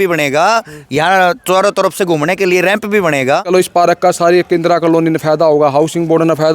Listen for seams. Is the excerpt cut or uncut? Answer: cut